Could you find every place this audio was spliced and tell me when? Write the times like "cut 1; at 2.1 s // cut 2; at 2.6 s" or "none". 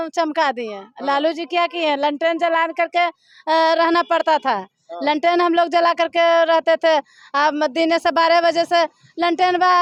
none